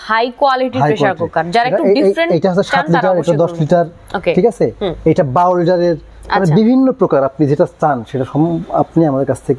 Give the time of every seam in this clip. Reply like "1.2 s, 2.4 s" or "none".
none